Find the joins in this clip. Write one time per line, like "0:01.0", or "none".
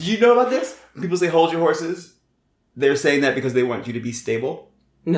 none